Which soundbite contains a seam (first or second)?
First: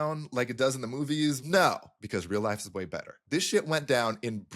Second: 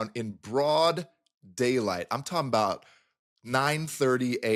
first